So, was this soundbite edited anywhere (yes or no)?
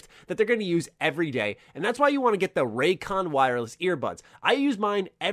no